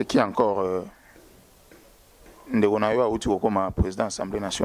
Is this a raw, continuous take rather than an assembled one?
yes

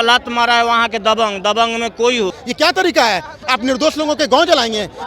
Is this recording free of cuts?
no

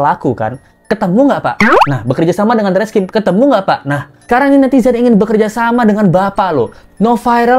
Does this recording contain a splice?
no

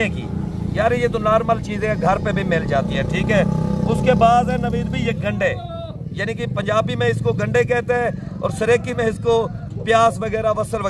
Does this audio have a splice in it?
no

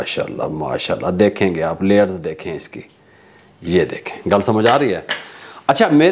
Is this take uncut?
yes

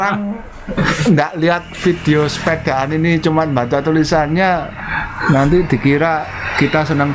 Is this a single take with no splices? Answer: yes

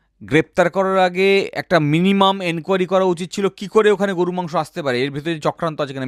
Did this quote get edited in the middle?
no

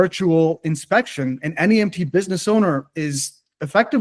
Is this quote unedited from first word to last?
yes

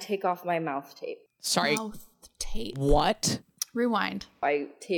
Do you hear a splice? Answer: yes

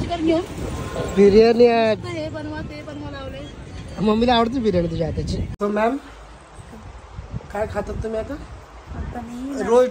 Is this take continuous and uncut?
no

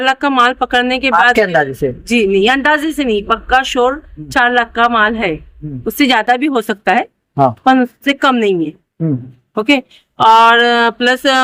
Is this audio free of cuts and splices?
yes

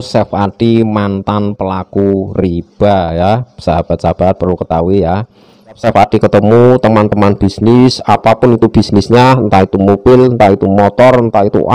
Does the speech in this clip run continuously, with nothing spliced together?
no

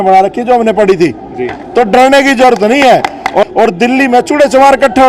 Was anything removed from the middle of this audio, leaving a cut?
yes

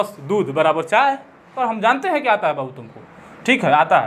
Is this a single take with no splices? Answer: no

